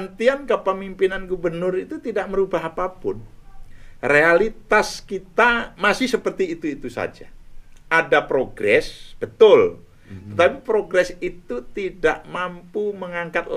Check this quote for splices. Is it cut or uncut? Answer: uncut